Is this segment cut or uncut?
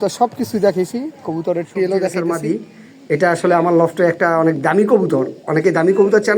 cut